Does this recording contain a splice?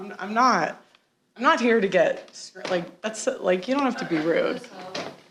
no; 0 cuts

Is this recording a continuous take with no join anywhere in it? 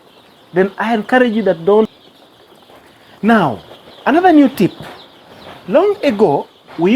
no; 1 cut; at 2.0 s

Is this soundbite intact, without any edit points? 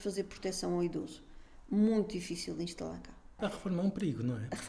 no; 1 cut; at 3.4 s

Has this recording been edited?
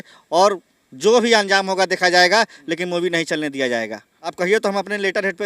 yes; 1 cut; at 4.2 s

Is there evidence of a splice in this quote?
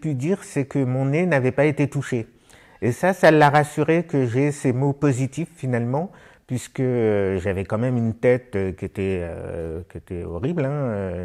no; 0 cuts

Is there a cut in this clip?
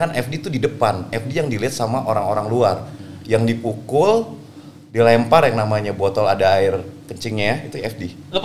no; 0 cuts

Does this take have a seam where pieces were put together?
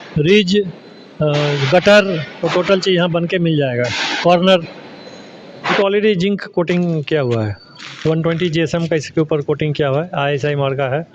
yes; 1 cut; at 5.7 s

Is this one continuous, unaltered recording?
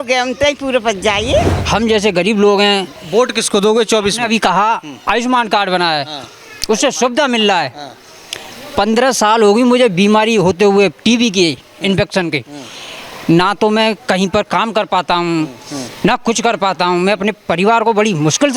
no; 1 cut; at 1.6 s

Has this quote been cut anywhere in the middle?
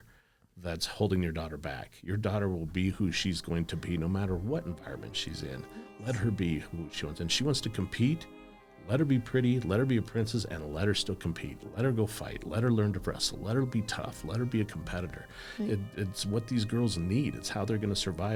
no; 0 cuts

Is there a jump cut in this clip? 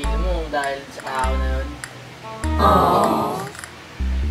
no; 0 cuts

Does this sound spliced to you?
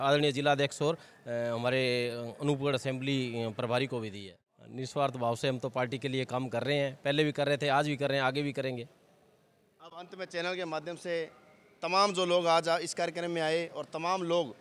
no; 0 cuts

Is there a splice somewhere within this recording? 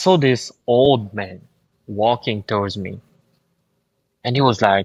no; 0 cuts

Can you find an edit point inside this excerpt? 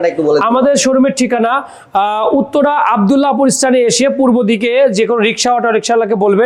no; 0 cuts

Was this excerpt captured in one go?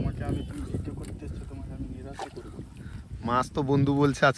yes; 0 cuts

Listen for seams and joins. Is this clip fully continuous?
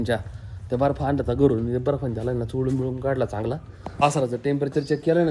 no; 1 cut; at 3.8 s

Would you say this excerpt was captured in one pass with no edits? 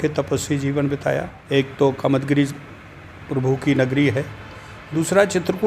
no; 1 cut; at 1.3 s

